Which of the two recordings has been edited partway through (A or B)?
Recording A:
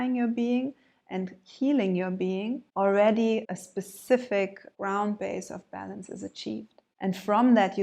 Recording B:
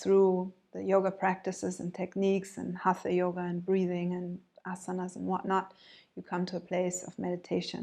A